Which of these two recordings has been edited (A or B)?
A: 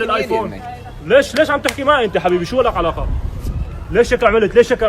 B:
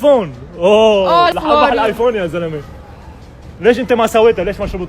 B